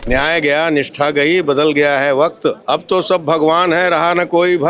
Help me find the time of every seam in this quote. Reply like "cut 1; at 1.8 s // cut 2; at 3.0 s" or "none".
cut 1; at 2.6 s